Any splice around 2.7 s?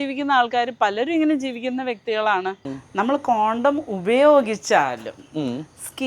yes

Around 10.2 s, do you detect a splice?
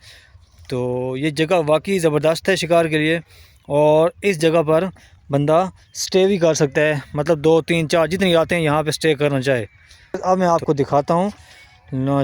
yes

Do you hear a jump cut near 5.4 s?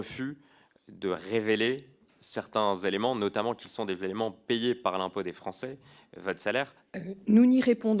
no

